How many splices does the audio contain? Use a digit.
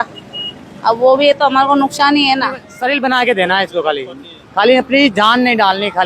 1